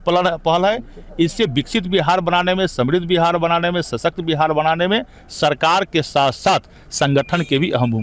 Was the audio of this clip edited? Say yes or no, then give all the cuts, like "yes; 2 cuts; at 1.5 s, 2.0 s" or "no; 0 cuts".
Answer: no; 0 cuts